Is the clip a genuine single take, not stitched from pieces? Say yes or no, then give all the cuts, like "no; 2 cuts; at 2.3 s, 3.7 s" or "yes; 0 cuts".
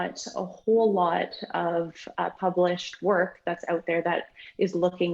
yes; 0 cuts